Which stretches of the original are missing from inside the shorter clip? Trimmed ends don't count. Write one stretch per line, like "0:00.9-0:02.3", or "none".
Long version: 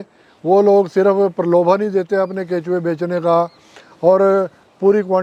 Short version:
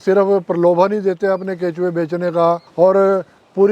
0:03.6-0:03.9